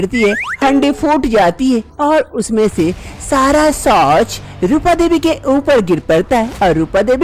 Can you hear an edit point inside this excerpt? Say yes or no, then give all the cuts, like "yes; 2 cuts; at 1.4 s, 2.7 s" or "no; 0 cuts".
no; 0 cuts